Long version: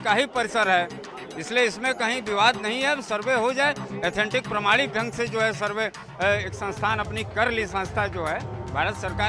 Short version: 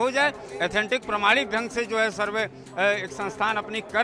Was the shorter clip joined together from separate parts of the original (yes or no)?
no